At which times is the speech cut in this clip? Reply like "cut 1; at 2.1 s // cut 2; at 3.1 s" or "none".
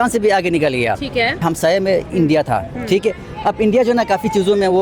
cut 1; at 1.4 s